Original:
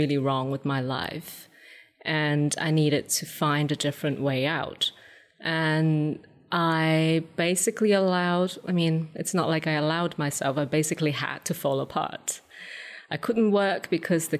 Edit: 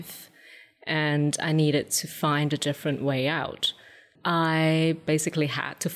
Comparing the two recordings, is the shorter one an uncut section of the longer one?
no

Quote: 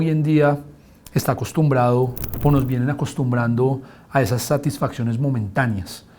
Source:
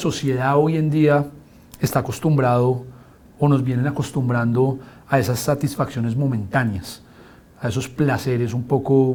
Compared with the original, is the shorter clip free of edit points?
no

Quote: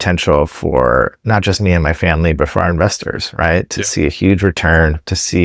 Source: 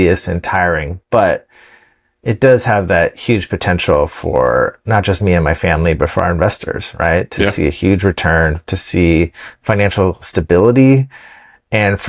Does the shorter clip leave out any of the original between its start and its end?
no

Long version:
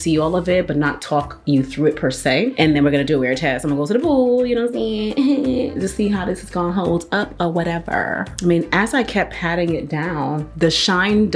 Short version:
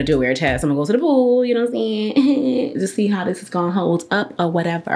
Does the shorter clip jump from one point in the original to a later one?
no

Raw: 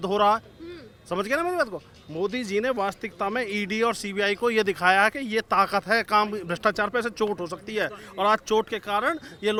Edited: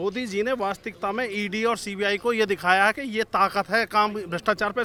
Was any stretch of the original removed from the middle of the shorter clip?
no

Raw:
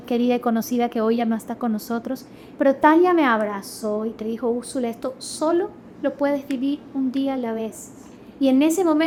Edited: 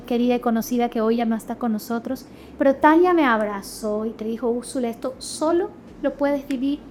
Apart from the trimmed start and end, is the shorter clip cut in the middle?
no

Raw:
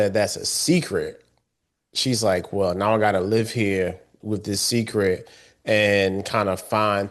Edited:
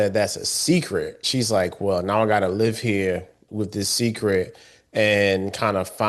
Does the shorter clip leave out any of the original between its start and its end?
yes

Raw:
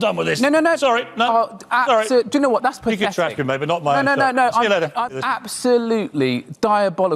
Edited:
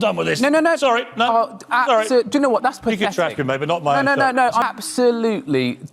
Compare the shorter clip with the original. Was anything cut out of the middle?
yes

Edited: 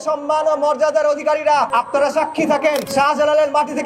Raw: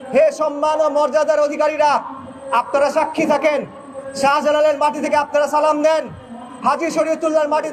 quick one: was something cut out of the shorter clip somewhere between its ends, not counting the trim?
yes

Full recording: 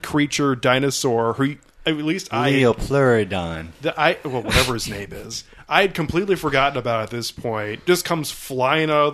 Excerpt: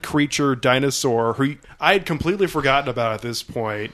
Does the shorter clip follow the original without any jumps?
no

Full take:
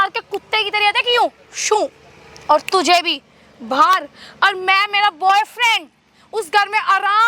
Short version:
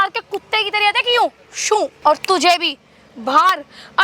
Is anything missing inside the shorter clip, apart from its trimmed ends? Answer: yes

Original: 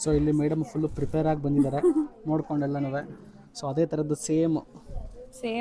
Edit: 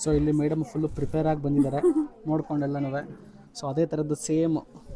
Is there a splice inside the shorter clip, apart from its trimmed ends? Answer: no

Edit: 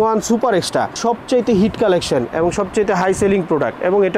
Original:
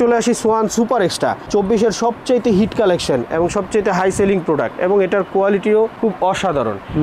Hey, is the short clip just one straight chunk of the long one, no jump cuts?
no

